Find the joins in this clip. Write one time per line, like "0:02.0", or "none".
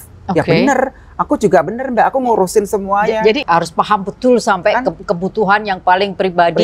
0:03.4